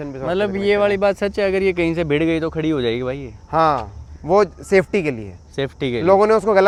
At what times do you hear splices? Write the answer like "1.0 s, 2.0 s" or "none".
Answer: none